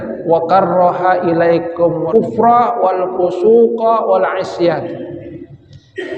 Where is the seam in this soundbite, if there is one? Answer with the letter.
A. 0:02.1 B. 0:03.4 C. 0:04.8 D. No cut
A